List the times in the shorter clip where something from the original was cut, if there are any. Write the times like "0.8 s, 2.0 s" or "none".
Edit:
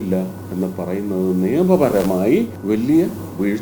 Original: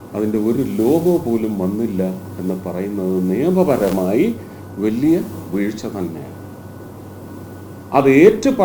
2.6 s